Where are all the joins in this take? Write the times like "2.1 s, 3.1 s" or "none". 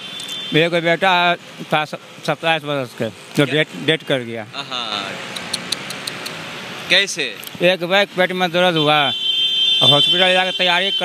none